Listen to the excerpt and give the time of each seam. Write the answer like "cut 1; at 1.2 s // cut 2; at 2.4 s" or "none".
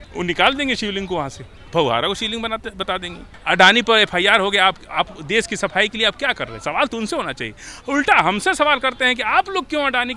cut 1; at 1.5 s // cut 2; at 3.3 s